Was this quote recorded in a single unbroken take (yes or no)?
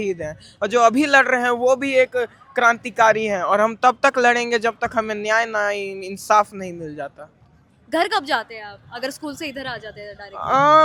yes